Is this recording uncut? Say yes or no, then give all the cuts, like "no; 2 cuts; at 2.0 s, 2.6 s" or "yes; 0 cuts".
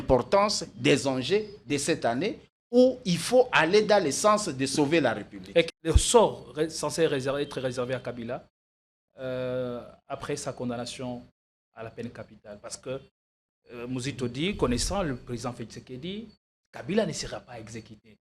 no; 1 cut; at 5.7 s